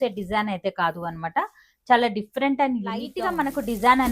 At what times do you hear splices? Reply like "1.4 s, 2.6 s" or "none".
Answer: 3.2 s